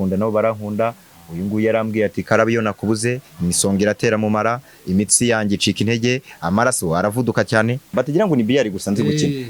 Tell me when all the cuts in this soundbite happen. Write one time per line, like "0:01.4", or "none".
0:07.8